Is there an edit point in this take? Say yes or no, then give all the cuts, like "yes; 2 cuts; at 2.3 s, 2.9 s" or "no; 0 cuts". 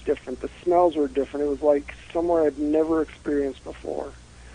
yes; 1 cut; at 2.0 s